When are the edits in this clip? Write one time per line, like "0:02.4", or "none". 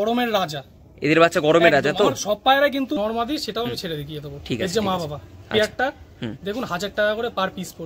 0:03.0